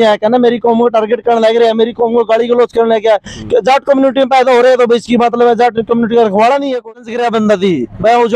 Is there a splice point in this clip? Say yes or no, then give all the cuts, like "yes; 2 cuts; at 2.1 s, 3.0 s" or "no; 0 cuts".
yes; 1 cut; at 6.9 s